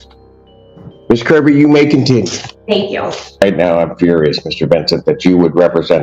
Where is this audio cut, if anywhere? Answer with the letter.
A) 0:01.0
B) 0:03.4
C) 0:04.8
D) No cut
B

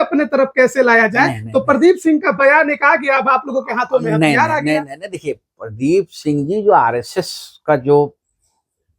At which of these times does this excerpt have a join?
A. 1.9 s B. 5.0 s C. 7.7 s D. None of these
D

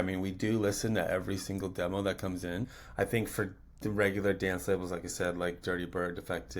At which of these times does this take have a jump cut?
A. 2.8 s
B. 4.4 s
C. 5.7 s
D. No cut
A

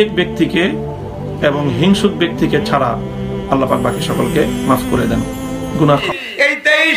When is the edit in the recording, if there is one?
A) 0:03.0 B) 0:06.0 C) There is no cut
B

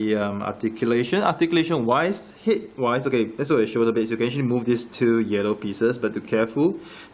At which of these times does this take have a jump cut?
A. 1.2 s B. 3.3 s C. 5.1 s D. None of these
C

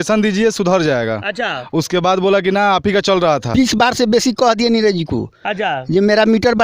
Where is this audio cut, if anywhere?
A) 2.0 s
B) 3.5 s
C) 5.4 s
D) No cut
B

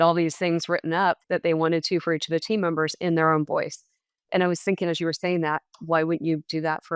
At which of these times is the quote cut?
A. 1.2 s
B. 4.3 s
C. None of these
A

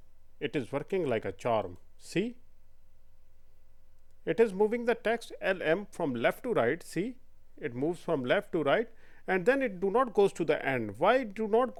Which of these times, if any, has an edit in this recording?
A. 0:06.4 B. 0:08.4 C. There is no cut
C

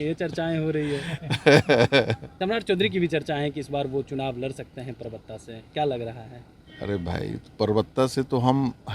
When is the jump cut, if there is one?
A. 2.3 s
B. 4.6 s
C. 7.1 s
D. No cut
A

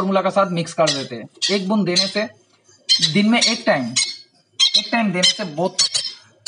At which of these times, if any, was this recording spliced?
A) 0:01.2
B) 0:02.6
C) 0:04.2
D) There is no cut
D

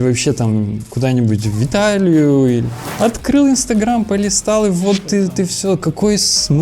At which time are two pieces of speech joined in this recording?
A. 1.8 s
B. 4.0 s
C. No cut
C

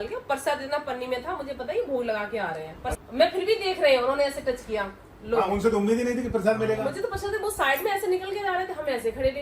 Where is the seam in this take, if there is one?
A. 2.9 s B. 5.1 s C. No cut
A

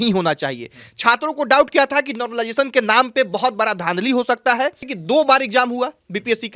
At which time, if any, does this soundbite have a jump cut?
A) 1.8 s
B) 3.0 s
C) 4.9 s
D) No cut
C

